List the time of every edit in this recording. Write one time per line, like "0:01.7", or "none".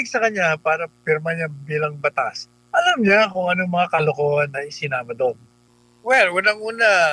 0:05.5